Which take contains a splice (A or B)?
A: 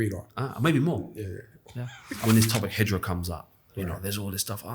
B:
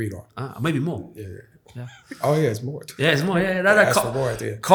A